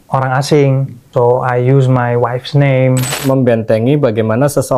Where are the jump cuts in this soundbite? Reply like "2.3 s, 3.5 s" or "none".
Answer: 0.9 s, 3.2 s